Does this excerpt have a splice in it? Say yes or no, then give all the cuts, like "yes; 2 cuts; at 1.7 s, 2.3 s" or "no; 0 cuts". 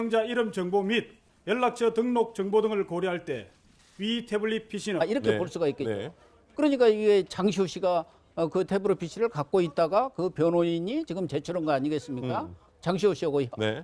no; 0 cuts